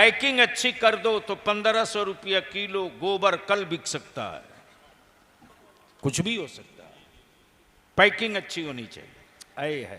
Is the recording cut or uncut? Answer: cut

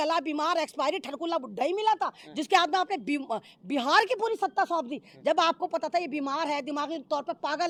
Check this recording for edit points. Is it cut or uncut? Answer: uncut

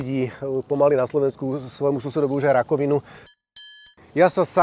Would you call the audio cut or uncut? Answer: cut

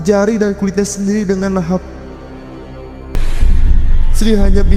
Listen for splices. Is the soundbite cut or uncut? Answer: cut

